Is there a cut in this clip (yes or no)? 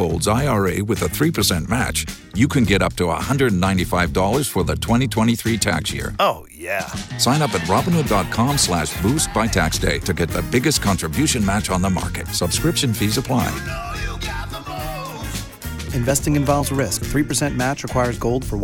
no